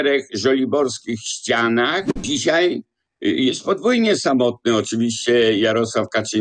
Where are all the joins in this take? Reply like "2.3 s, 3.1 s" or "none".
2.2 s